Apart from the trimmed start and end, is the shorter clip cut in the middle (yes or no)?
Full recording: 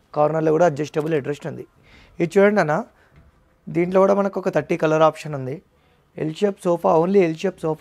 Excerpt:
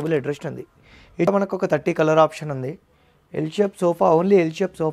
yes